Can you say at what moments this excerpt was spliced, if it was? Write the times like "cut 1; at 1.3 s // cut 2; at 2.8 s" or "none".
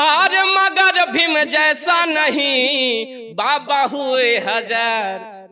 none